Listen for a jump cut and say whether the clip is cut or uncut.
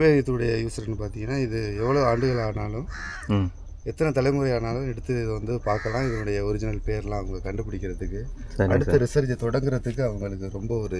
uncut